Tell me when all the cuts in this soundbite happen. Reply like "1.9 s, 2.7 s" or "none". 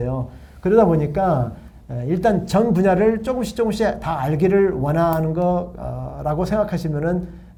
none